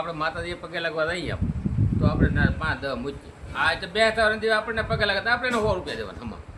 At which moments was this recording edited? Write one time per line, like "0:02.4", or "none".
none